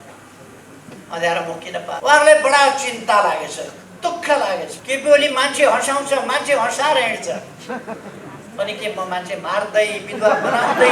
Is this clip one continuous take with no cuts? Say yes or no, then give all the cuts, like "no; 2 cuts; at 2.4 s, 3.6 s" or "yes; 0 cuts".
no; 2 cuts; at 2.0 s, 4.8 s